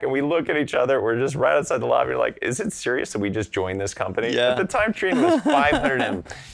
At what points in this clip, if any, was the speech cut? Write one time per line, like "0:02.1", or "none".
none